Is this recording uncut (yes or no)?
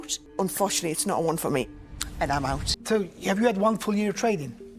no